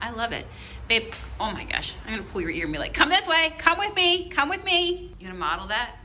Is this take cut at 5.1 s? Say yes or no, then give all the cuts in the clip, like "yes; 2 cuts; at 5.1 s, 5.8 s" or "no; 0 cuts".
yes; 1 cut; at 5.1 s